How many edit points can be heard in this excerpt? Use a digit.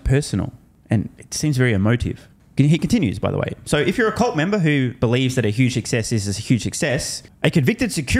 0